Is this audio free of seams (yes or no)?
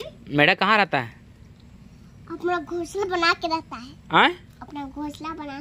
yes